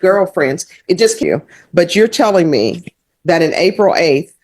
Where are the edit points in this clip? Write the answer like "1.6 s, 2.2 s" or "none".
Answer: 1.2 s